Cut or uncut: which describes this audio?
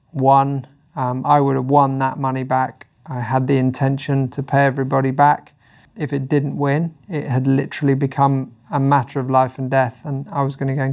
cut